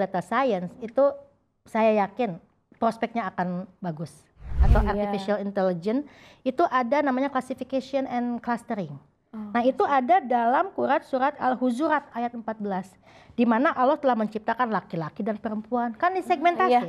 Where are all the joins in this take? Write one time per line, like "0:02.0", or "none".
0:04.6